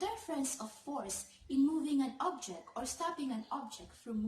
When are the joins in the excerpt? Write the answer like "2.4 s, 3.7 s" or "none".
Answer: none